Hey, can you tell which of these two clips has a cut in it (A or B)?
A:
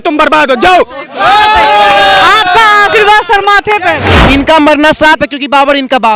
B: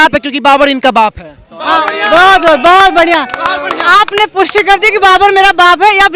A